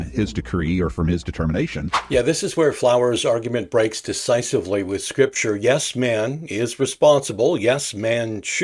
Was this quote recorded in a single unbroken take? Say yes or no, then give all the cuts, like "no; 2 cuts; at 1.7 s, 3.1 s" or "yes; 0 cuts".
yes; 0 cuts